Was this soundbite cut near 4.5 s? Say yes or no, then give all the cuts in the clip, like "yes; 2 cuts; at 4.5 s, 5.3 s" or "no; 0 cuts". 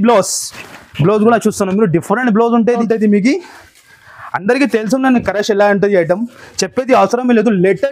no; 1 cut; at 2.8 s